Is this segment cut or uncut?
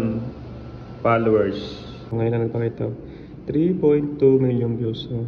cut